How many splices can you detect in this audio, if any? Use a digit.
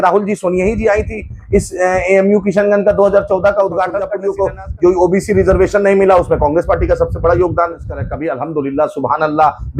2